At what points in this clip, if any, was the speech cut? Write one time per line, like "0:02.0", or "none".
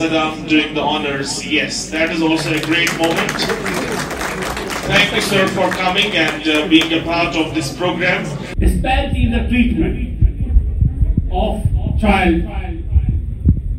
none